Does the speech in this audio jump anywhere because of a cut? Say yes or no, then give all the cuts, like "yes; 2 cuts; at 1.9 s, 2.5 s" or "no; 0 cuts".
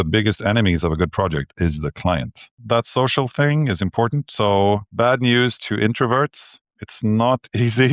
yes; 2 cuts; at 2.6 s, 4.9 s